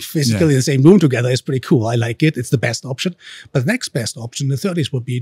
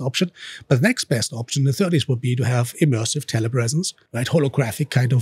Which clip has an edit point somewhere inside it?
second; 1 cut; at 4.0 s

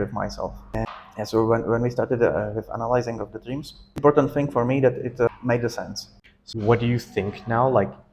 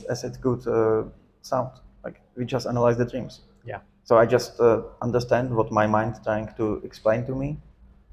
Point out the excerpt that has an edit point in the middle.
first; 3 cuts; at 0.9 s, 4.0 s, 5.7 s

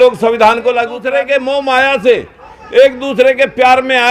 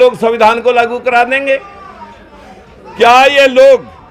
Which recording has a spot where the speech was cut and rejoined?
first; 1 cut; at 1.0 s

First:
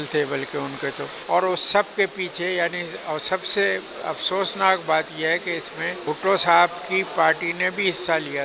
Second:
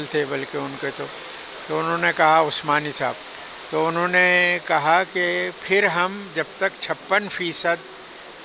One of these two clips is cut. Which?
first; 2 cuts; at 1.1 s, 5.9 s

